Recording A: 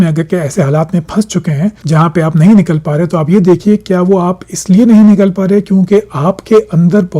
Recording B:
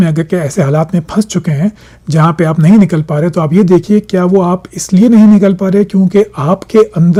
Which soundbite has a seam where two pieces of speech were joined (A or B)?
A